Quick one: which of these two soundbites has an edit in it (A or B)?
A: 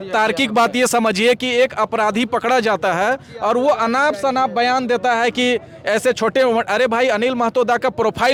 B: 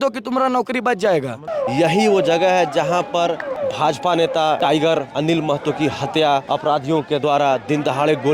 B